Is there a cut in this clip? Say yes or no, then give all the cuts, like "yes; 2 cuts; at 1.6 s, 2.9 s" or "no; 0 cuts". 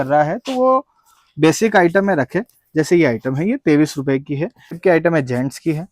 yes; 1 cut; at 4.8 s